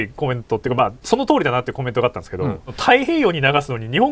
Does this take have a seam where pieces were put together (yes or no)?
yes